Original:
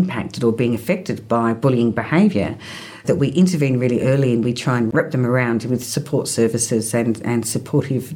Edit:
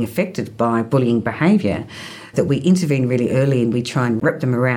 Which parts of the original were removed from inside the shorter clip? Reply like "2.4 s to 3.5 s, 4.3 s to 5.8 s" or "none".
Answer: none